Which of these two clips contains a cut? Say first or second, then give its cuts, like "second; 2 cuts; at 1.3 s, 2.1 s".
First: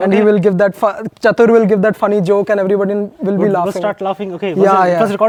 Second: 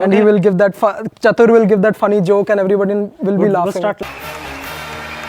second; 1 cut; at 4.1 s